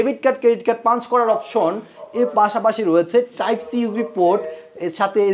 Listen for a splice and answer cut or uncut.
uncut